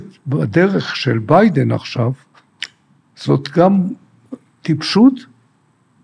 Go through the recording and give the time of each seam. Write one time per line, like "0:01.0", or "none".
none